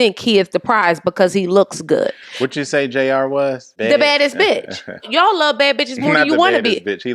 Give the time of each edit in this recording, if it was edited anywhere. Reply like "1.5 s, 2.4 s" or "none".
3.7 s, 5.1 s

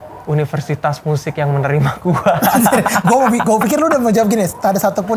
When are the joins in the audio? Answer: none

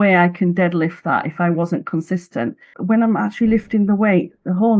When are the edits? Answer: 2.7 s

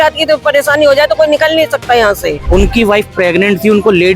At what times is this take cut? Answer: 2.4 s

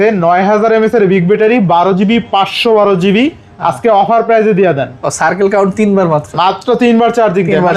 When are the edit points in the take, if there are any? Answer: none

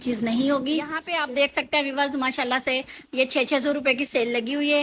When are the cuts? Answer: 1.0 s

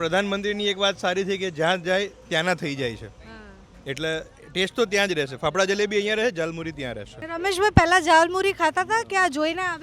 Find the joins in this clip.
7.2 s

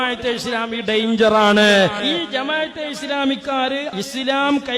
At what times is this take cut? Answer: none

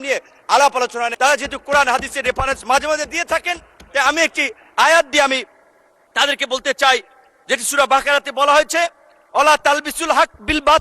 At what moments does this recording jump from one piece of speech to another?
1.1 s

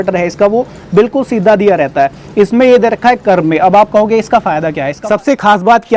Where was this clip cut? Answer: 4.9 s

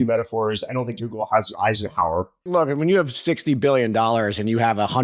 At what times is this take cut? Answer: 2.5 s

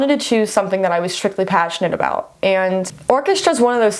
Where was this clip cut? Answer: 2.9 s

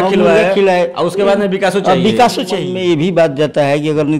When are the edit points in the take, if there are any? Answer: 2.6 s

